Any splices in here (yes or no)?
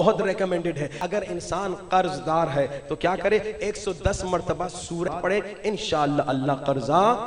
yes